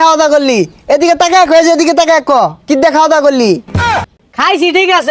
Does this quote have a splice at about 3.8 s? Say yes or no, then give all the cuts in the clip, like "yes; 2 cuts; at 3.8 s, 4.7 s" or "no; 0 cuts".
no; 0 cuts